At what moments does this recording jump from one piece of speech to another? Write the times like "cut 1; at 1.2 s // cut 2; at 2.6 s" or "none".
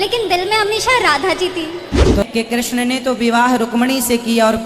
cut 1; at 2.2 s